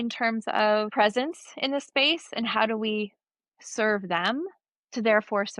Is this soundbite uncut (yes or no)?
no